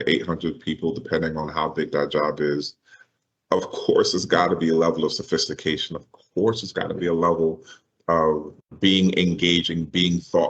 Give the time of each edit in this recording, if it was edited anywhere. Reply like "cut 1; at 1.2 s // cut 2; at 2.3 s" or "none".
cut 1; at 8.6 s

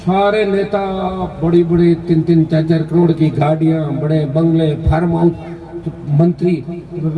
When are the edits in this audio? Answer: none

